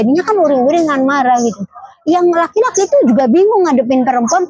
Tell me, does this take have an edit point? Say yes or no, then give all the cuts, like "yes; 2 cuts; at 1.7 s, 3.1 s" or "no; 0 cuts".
no; 0 cuts